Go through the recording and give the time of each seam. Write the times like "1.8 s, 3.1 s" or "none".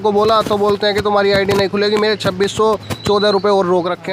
none